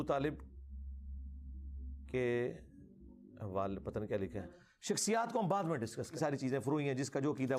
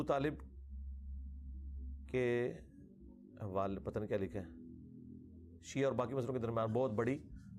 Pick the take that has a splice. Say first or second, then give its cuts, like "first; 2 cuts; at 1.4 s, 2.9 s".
first; 2 cuts; at 4.7 s, 6.1 s